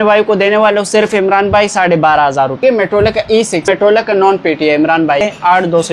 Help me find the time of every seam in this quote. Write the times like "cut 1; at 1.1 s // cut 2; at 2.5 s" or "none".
cut 1; at 2.6 s // cut 2; at 3.7 s // cut 3; at 5.2 s